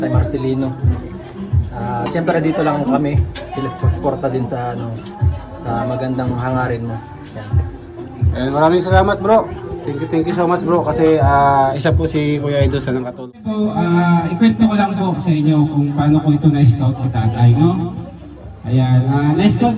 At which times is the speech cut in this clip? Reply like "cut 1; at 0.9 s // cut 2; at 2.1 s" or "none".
cut 1; at 13.2 s